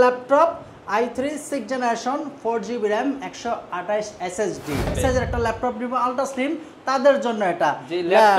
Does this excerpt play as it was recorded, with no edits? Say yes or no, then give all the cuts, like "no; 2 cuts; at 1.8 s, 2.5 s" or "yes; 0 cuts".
no; 1 cut; at 4.9 s